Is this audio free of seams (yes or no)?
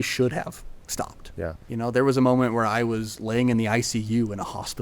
no